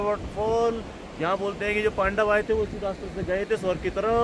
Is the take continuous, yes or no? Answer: yes